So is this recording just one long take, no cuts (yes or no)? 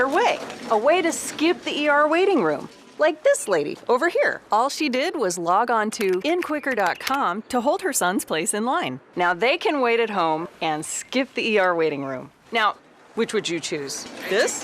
yes